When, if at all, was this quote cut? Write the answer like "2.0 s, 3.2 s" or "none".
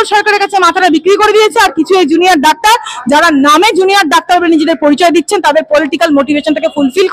none